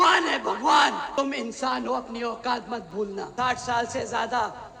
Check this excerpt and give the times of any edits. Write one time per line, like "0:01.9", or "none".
0:01.1
0:03.3

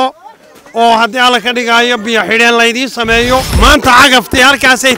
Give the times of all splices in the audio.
0:03.7

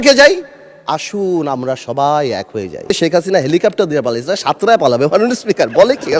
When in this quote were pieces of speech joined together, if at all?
0:02.9

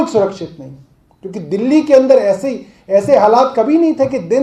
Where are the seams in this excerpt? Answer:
none

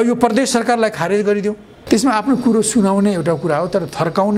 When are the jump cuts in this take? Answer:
0:01.7

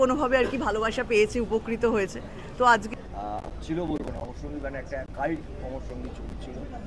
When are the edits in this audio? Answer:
0:02.9

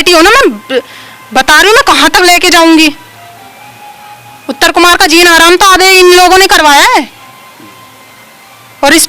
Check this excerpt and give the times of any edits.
none

